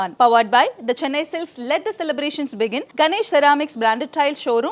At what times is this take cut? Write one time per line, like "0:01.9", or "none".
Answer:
none